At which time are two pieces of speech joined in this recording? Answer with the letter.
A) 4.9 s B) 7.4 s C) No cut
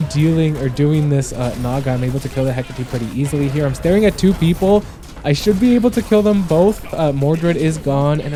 C